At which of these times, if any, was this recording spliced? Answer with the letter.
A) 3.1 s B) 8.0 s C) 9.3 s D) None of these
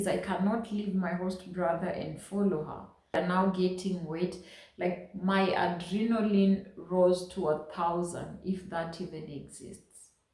A